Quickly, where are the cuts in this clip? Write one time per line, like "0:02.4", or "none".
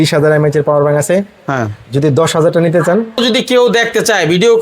0:03.2

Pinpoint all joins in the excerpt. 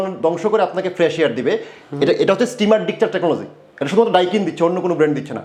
none

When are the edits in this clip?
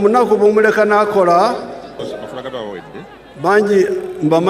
0:02.0

